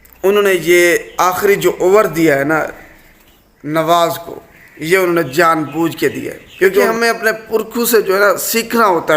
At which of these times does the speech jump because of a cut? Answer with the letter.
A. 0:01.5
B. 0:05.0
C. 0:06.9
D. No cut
C